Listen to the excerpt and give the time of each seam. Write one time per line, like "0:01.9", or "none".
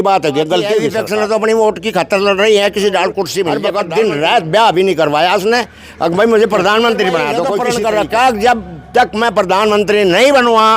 0:00.9
0:03.6
0:07.5